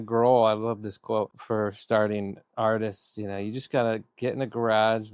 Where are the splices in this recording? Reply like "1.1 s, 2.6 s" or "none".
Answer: 1.4 s